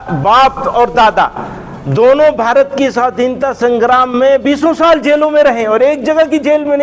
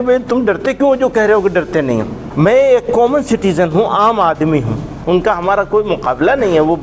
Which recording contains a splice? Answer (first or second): second